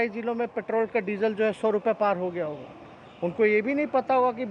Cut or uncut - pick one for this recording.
uncut